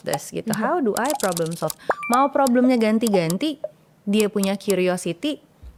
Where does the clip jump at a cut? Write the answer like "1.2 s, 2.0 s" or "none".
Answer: none